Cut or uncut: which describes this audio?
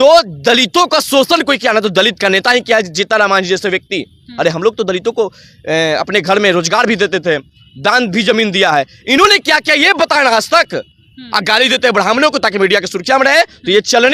uncut